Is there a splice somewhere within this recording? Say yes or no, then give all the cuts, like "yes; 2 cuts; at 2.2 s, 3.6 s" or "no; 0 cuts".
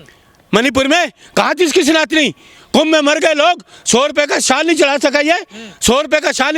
no; 0 cuts